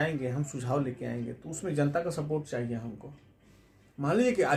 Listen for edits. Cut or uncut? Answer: uncut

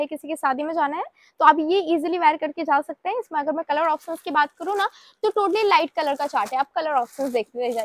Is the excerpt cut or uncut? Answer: uncut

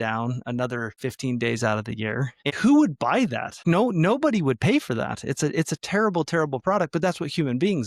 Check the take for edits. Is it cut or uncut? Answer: cut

